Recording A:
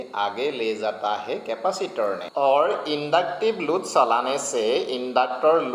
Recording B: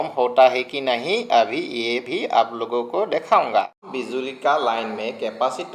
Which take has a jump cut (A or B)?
B